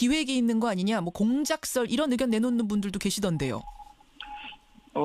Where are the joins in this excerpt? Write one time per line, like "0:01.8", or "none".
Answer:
0:01.6